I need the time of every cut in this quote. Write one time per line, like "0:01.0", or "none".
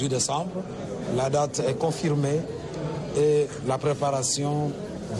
none

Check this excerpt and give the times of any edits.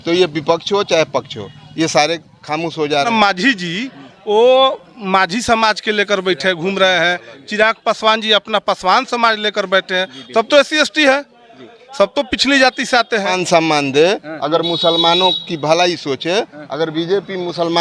0:03.1
0:13.3

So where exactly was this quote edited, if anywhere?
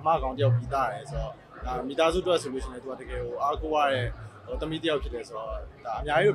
none

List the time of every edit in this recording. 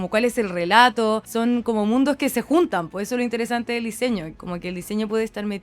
0:01.3
0:04.3

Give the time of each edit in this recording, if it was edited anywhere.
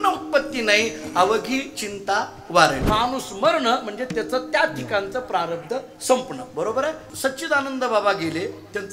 0:02.8
0:07.1

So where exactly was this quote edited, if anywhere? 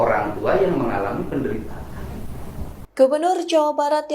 0:02.8

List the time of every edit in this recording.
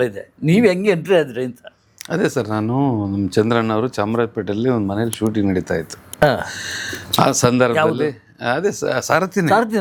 none

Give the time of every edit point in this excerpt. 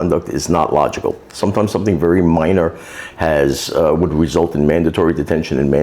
none

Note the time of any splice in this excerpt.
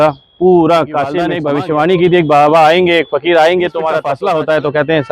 0:01.3
0:04.1

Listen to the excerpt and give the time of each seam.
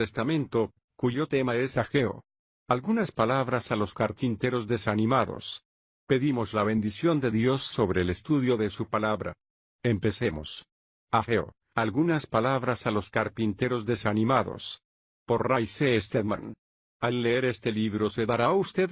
none

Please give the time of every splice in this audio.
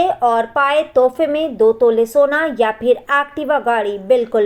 none

